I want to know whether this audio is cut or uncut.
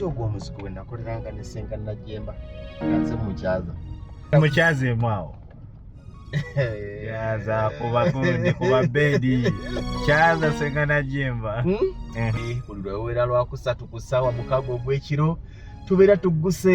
cut